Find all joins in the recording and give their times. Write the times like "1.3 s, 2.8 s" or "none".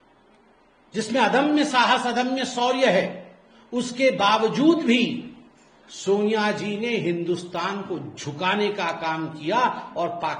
none